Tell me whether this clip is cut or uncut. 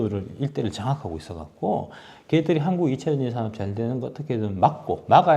uncut